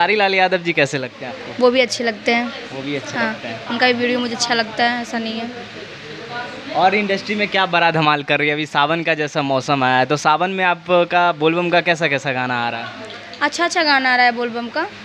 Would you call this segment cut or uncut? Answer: uncut